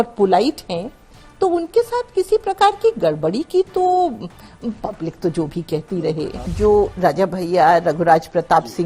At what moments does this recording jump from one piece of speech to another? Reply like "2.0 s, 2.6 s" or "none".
6.3 s